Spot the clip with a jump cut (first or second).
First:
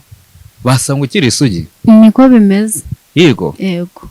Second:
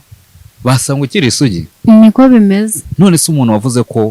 second